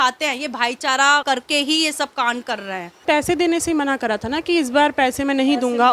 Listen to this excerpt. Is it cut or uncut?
cut